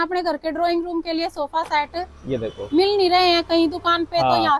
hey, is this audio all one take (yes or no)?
yes